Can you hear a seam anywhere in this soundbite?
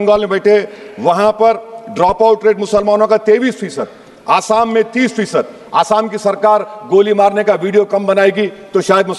no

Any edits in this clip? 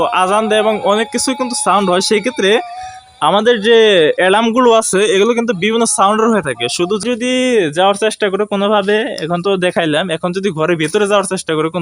yes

